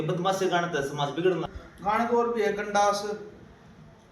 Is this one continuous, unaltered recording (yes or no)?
no